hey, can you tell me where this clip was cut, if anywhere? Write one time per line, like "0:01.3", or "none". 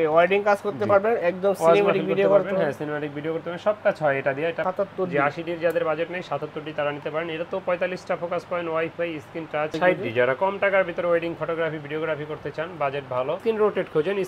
0:04.6
0:09.7
0:13.4